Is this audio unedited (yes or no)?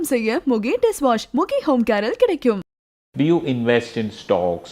no